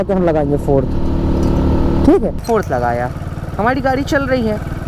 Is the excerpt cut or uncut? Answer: cut